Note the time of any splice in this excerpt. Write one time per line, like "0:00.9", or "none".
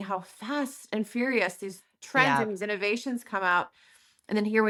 none